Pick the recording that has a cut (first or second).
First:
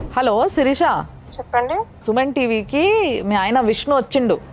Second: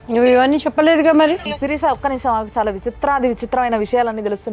second